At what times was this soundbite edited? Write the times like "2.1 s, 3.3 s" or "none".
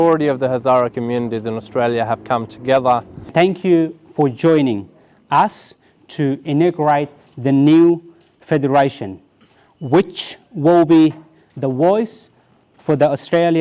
3.3 s

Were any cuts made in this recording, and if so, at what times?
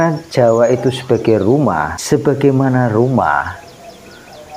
1.9 s

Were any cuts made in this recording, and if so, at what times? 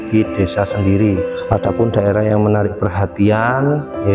1.3 s

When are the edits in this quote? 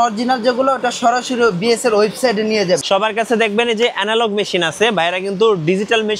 2.8 s

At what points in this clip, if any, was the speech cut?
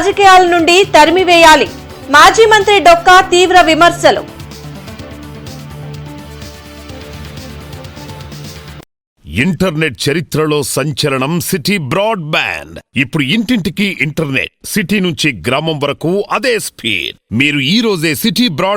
9.1 s

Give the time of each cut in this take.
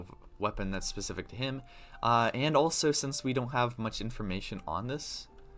none

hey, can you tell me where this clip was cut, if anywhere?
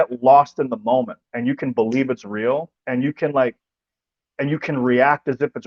none

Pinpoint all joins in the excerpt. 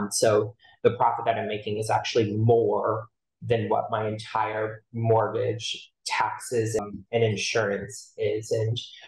6.8 s

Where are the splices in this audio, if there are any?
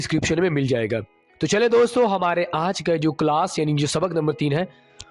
none

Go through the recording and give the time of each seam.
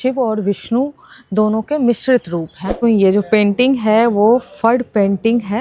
2.7 s

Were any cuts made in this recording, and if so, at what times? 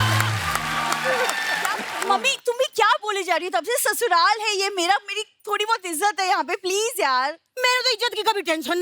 1.9 s

